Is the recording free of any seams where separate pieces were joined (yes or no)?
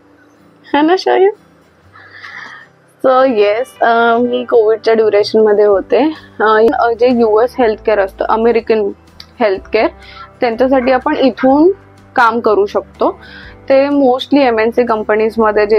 no